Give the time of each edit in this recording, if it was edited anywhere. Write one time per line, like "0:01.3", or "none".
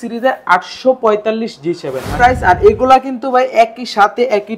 0:02.1